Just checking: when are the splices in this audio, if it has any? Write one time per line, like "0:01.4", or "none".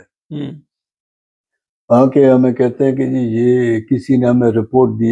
none